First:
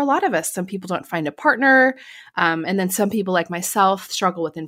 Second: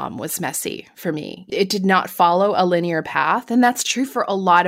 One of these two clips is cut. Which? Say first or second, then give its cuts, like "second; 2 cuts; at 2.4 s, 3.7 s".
second; 1 cut; at 1.4 s